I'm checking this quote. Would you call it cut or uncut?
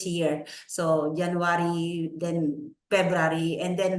uncut